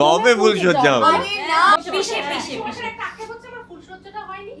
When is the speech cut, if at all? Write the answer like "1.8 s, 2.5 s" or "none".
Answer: 1.8 s

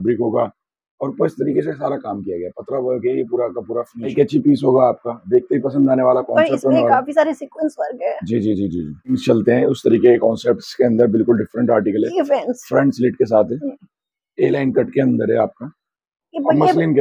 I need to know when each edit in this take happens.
4.1 s, 9.2 s

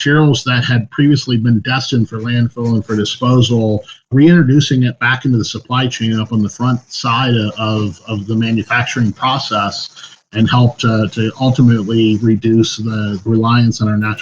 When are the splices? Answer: 13.2 s

